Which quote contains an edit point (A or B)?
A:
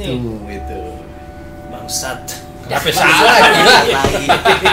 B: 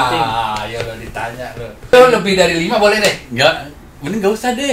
B